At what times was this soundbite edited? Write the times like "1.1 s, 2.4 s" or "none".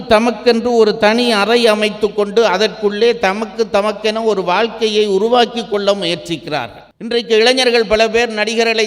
6.9 s